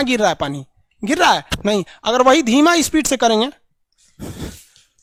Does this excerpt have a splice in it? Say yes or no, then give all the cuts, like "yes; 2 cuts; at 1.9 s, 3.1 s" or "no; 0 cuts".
no; 0 cuts